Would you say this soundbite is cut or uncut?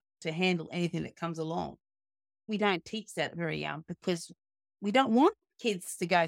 cut